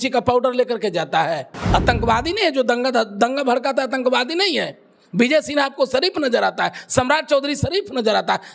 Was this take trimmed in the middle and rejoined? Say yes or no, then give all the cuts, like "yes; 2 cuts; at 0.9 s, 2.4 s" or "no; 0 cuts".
yes; 1 cut; at 1.5 s